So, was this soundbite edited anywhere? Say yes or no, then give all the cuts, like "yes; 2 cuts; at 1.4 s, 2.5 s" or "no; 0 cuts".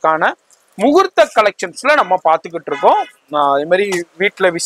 no; 0 cuts